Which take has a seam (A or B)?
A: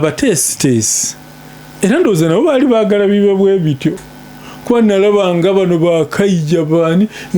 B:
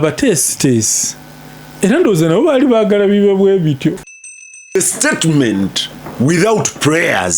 B